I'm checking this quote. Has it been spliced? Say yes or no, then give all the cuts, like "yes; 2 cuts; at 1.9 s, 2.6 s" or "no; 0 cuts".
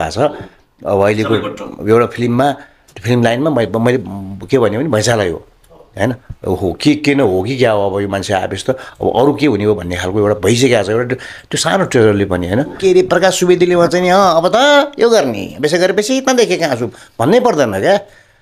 yes; 1 cut; at 12.8 s